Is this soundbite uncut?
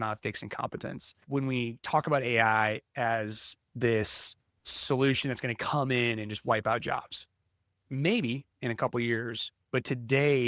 no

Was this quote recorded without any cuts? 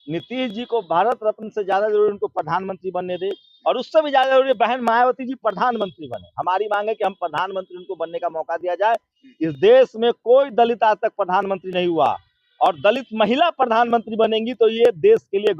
yes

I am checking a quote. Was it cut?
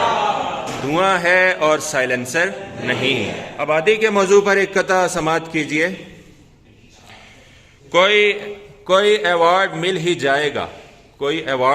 yes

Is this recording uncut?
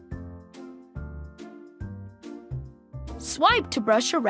no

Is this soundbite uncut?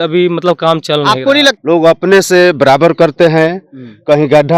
no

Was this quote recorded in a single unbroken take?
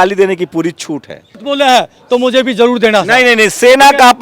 no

